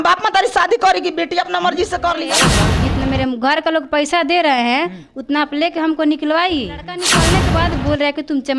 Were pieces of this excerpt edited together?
yes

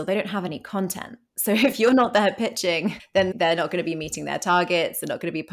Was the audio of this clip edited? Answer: yes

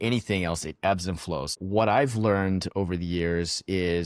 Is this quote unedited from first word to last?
no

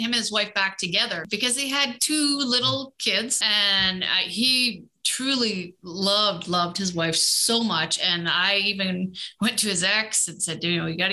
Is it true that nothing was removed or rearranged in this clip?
no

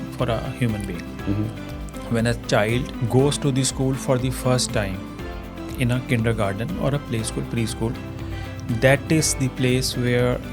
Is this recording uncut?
no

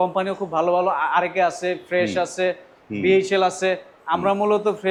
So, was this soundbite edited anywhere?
no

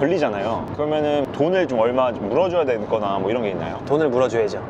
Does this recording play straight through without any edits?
no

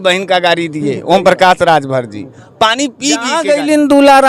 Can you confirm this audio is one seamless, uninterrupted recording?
no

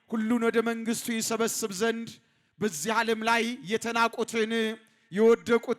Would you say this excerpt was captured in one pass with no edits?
yes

